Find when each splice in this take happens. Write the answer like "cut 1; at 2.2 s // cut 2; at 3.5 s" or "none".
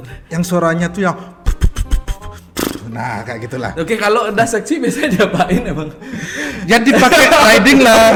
none